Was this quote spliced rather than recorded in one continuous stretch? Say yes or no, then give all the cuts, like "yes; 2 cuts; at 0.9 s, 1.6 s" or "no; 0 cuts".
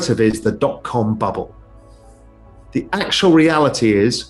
no; 0 cuts